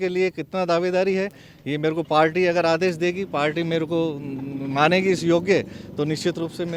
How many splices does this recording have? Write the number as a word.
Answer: zero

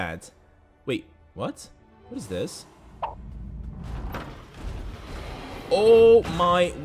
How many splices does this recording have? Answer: zero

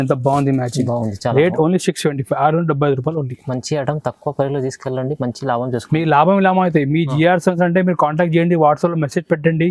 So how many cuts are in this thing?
zero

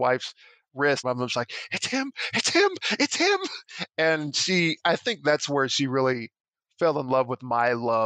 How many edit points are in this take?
one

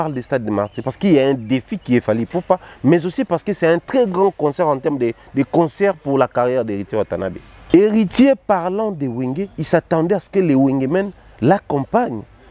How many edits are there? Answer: one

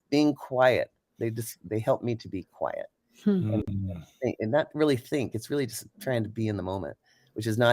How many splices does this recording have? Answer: zero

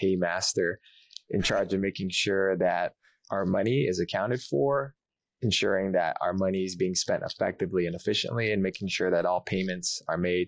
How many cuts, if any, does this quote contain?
zero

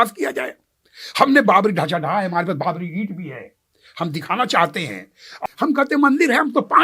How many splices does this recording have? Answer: one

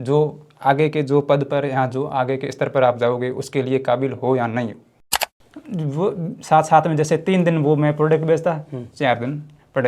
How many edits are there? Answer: one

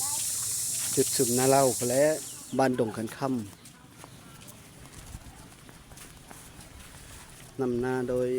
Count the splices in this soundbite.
one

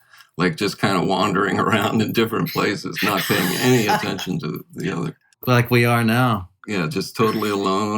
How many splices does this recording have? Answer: two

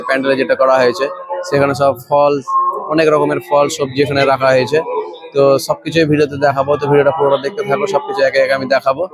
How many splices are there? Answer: zero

